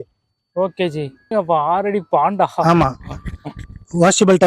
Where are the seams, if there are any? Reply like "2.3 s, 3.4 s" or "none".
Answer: 1.3 s